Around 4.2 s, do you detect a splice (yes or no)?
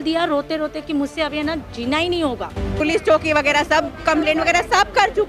no